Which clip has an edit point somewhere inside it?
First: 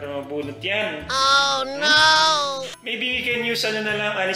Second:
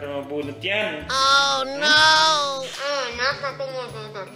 first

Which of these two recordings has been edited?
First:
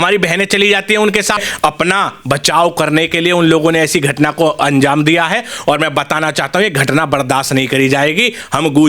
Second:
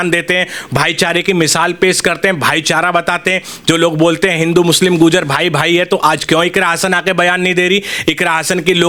first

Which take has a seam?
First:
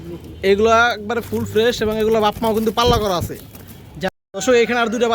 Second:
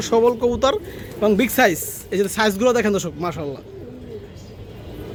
first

